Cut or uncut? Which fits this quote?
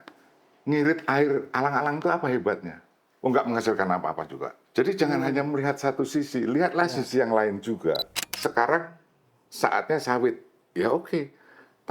cut